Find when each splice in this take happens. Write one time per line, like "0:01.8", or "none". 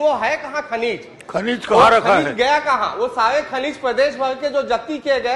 none